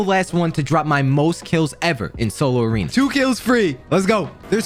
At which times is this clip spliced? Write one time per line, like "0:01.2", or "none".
none